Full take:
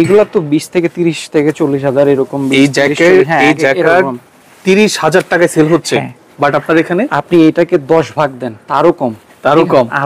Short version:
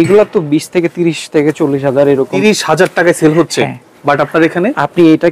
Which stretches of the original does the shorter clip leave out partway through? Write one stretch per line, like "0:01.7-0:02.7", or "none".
0:02.3-0:04.7